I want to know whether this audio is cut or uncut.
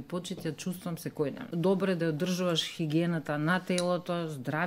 cut